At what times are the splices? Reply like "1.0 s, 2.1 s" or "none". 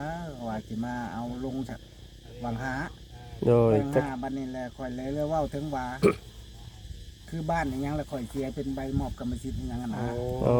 none